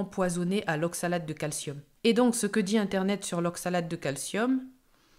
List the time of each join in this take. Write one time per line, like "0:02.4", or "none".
none